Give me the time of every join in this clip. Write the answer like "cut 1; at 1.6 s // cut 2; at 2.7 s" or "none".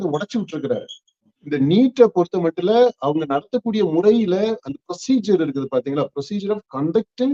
cut 1; at 1.3 s